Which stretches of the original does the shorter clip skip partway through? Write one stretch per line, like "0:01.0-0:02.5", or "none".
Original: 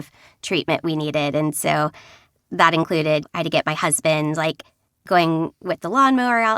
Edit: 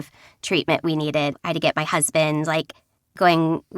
0:01.3-0:03.2